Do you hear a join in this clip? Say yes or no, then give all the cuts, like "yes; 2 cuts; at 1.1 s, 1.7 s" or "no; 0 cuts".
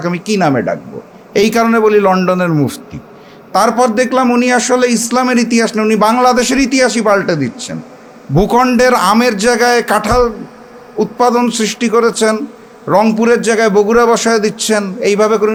no; 0 cuts